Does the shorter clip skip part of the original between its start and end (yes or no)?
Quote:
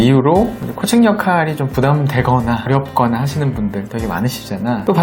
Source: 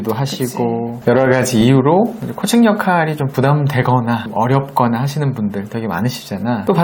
yes